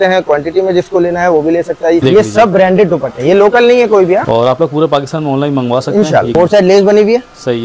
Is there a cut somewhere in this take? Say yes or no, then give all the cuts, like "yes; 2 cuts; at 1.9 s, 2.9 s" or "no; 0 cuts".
yes; 3 cuts; at 2.0 s, 4.2 s, 6.3 s